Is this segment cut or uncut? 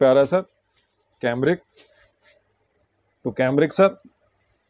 uncut